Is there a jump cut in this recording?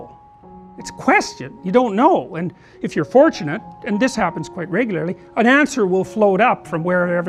no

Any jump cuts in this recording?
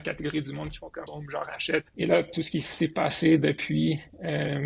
yes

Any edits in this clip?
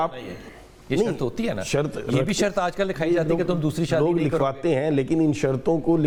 no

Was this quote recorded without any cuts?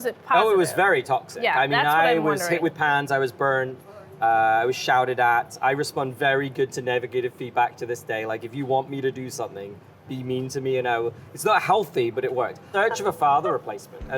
no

